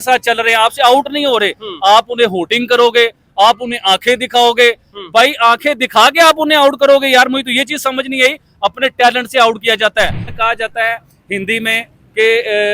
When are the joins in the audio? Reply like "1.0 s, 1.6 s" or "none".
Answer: 10.2 s